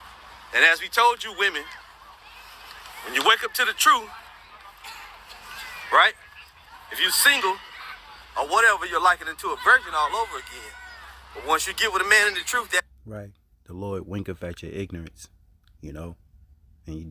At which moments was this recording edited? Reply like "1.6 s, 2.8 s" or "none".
none